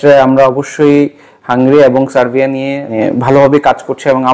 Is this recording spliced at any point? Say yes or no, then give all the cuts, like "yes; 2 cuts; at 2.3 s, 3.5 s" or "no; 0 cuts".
yes; 1 cut; at 2.9 s